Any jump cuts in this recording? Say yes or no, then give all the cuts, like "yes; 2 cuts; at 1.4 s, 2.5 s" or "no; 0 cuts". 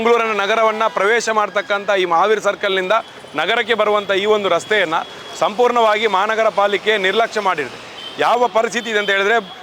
no; 0 cuts